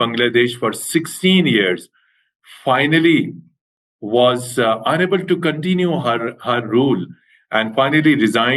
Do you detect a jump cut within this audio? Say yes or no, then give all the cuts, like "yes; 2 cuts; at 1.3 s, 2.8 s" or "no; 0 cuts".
no; 0 cuts